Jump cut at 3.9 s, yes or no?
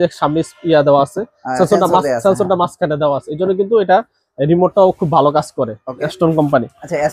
no